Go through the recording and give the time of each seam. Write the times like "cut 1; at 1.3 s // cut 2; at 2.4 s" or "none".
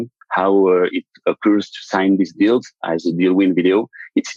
none